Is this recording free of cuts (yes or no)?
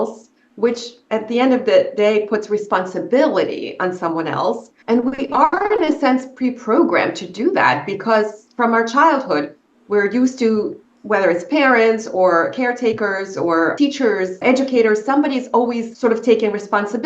no